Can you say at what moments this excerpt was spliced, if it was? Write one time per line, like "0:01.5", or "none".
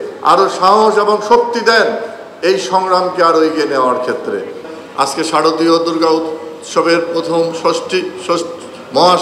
0:04.7